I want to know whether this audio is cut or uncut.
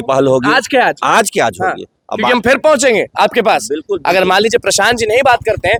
uncut